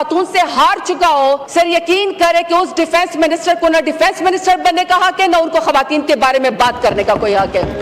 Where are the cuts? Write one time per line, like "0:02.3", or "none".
0:01.5